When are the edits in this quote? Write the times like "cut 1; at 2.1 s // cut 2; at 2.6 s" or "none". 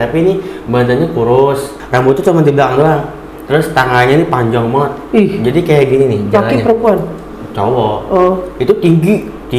cut 1; at 1.8 s